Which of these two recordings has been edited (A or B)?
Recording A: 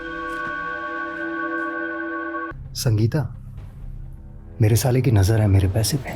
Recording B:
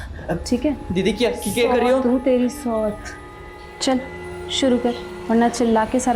A